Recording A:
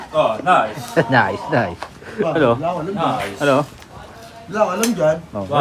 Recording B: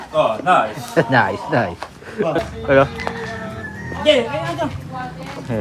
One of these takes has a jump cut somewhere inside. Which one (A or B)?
B